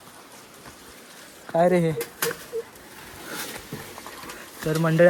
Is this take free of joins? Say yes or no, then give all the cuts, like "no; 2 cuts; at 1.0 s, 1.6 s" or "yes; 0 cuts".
yes; 0 cuts